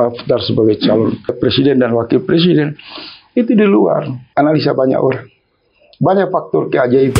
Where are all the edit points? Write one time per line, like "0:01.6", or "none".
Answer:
0:01.4
0:04.2